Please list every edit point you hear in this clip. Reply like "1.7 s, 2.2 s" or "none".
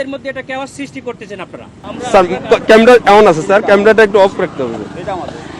1.8 s